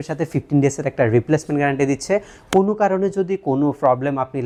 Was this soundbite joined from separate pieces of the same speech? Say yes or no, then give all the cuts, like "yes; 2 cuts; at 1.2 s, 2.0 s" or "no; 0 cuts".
no; 0 cuts